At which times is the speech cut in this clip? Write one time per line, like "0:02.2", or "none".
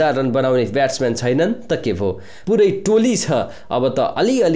0:02.3